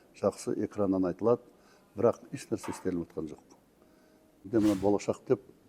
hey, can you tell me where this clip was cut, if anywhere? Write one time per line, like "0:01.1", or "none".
0:04.5